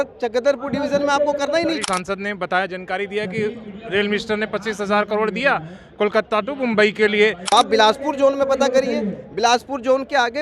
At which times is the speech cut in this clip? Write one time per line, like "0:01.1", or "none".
0:01.8
0:07.4